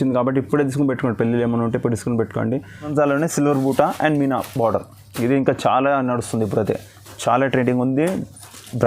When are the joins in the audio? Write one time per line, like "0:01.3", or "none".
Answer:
0:02.9

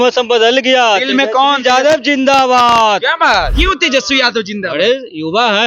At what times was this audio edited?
0:03.5

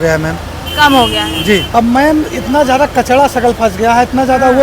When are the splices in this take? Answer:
0:01.7

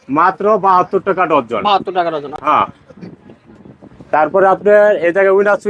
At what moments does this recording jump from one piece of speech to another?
none

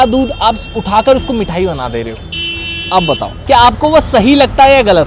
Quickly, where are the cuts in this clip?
0:03.4

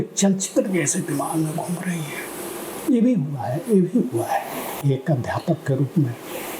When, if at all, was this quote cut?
0:04.8

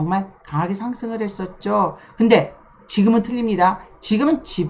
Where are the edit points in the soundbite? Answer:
none

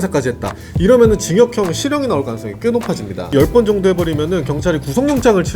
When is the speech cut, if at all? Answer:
0:03.3

